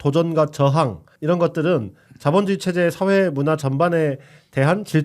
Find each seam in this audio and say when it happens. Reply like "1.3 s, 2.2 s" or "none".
1.1 s